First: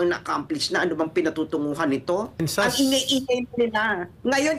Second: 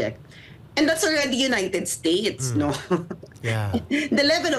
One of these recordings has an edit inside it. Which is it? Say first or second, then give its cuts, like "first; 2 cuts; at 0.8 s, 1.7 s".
first; 1 cut; at 2.4 s